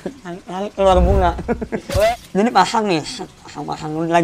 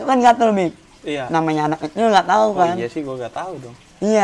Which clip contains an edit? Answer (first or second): first